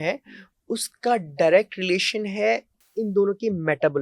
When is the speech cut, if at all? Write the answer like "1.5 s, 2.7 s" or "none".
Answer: 2.8 s